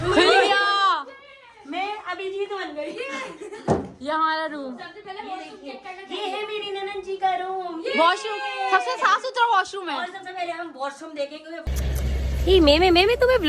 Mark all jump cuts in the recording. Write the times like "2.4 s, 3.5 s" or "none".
11.6 s